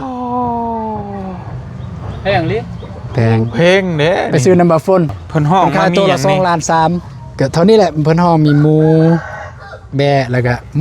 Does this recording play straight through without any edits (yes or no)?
no